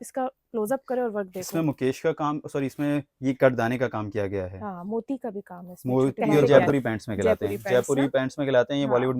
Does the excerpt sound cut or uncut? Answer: cut